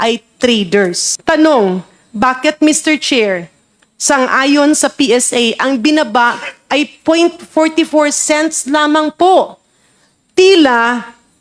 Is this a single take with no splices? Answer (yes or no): no